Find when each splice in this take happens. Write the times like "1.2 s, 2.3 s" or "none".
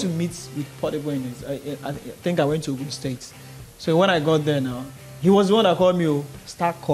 none

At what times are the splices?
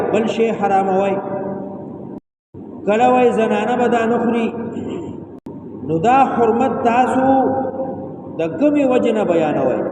2.4 s, 5.4 s

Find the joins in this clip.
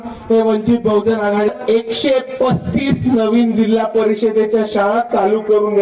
1.5 s

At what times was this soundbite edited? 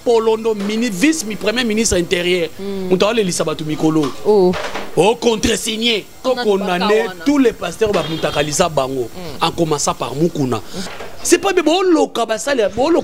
6.2 s, 10.8 s

